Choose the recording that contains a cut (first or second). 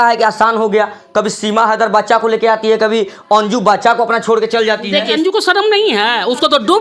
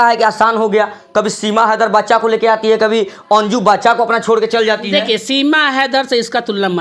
first